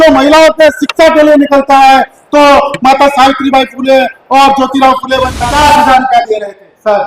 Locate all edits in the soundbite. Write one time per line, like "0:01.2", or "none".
0:05.3